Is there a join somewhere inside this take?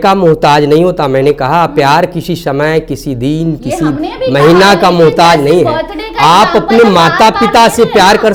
no; 0 cuts

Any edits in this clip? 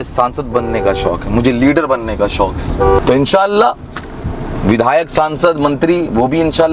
yes; 1 cut; at 3.0 s

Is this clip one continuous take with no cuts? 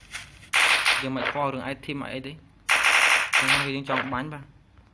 yes; 0 cuts

